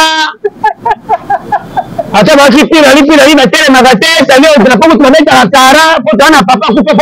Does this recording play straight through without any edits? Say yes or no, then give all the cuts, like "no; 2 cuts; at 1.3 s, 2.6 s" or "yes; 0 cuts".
yes; 0 cuts